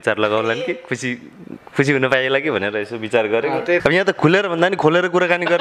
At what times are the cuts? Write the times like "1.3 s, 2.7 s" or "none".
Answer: 3.8 s